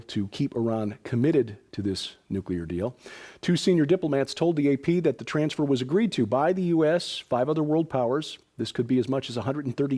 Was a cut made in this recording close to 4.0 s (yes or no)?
yes